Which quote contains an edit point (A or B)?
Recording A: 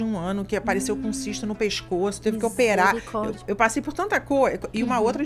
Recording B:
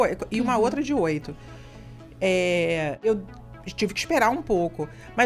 B